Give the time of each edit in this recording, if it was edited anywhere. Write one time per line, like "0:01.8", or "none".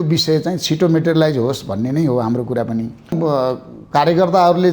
0:03.2